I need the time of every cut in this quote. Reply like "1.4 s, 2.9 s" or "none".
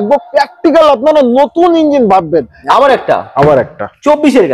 2.6 s